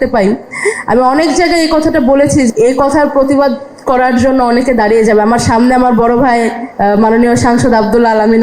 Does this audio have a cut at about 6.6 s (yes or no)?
yes